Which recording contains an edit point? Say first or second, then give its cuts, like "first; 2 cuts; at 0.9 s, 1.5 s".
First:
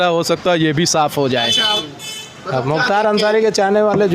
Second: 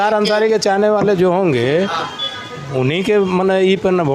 first; 1 cut; at 1.8 s